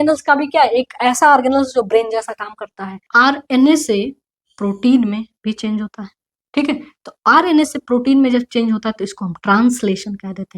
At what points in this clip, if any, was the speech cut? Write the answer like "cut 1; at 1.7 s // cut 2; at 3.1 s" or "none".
cut 1; at 3.0 s